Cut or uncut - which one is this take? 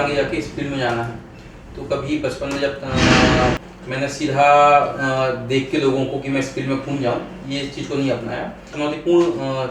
cut